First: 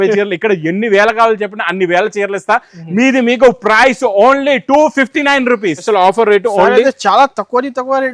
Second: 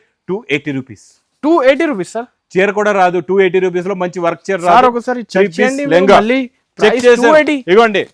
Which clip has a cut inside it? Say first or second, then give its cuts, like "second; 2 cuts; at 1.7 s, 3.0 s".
first; 1 cut; at 5.8 s